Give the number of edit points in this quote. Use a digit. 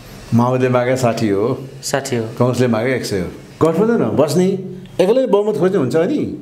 1